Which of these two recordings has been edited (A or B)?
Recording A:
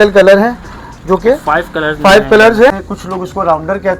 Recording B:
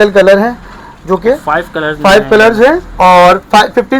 A